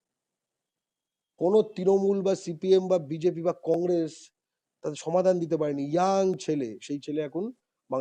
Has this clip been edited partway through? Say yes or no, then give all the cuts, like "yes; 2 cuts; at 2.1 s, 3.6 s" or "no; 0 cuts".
no; 0 cuts